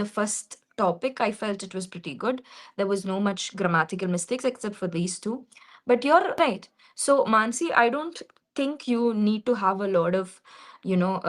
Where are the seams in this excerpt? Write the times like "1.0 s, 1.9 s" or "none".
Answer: 6.4 s